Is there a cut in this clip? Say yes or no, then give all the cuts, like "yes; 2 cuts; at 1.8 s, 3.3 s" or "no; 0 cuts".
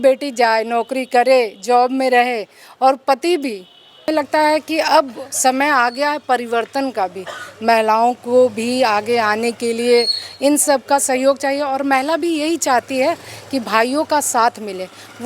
yes; 1 cut; at 4.1 s